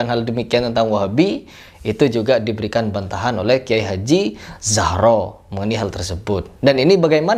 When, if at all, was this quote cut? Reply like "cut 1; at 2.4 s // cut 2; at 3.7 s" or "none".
none